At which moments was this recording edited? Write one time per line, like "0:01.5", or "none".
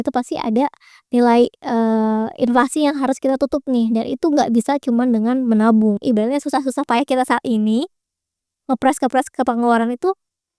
0:06.0